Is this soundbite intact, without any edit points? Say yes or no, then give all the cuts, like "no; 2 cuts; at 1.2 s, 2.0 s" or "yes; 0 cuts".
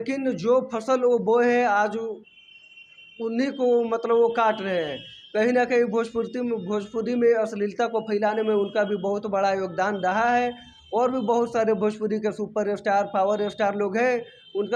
yes; 0 cuts